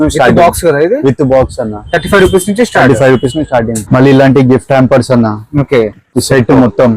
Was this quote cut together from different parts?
yes; 1 cut; at 3.8 s

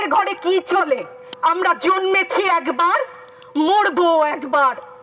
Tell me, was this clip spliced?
yes; 1 cut; at 1.2 s

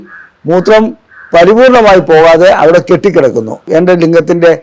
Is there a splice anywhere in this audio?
yes; 1 cut; at 3.6 s

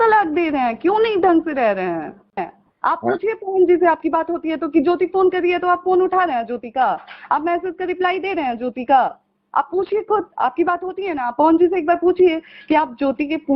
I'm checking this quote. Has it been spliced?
yes; 1 cut; at 2.4 s

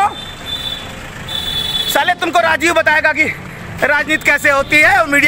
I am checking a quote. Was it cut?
no; 0 cuts

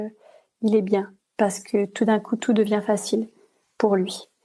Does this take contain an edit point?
yes; 1 cut; at 1.2 s

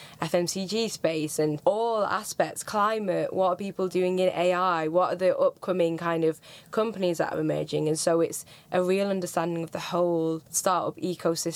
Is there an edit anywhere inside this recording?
yes; 2 cuts; at 1.6 s, 10.5 s

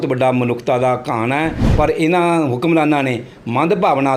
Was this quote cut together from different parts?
yes; 1 cut; at 1.6 s

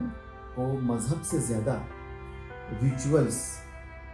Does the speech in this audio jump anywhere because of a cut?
no; 0 cuts

